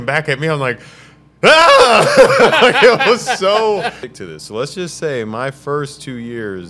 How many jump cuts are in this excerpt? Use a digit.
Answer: 1